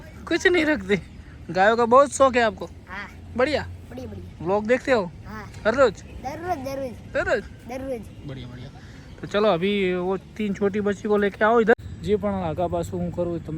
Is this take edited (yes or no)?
yes